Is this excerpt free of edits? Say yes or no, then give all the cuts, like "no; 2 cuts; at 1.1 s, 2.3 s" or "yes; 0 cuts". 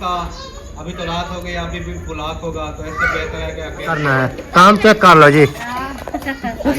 no; 1 cut; at 4.0 s